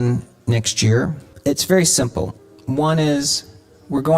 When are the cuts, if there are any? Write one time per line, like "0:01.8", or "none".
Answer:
0:01.2